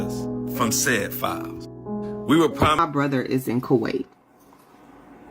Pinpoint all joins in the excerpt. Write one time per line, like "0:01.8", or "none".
0:02.8